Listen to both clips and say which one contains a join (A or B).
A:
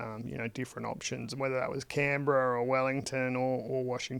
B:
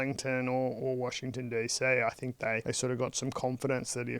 B